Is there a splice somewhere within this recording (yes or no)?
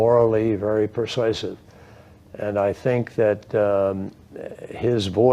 yes